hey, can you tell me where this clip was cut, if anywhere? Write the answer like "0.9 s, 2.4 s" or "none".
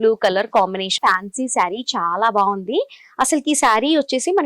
0.9 s